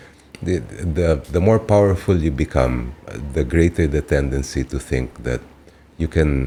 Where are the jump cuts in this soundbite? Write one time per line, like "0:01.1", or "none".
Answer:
none